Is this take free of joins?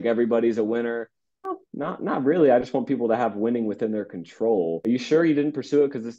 no; 2 cuts; at 1.6 s, 4.8 s

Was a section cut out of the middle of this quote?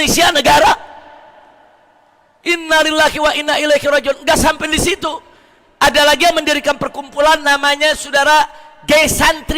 no; 0 cuts

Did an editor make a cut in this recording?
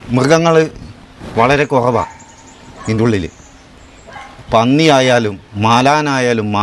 no; 0 cuts

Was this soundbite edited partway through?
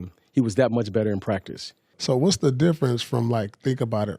yes; 1 cut; at 2.0 s

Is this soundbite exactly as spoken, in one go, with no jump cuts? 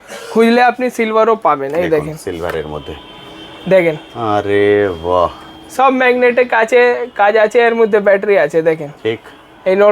yes; 0 cuts

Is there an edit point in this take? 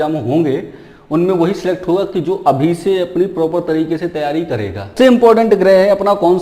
yes; 1 cut; at 4.9 s

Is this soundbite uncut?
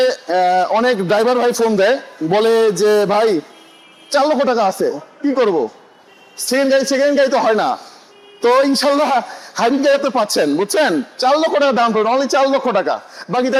yes; 0 cuts

